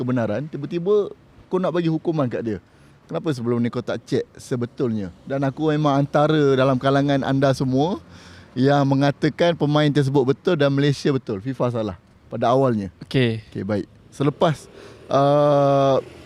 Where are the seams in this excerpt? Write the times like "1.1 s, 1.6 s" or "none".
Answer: none